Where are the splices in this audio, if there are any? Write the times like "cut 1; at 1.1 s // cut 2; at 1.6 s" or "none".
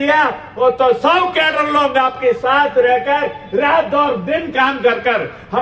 none